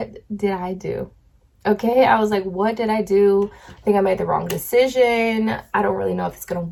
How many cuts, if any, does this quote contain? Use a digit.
0